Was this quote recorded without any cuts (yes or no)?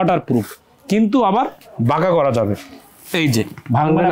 yes